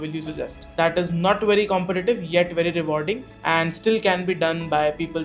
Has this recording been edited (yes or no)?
no